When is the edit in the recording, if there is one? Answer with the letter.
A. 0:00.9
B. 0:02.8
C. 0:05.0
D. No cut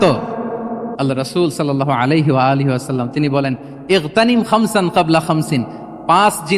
A